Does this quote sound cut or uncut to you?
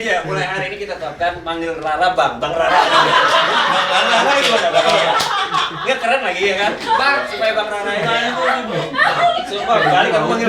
uncut